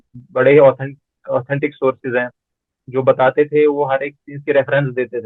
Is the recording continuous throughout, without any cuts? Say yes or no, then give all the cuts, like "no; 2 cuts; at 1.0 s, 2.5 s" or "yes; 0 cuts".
yes; 0 cuts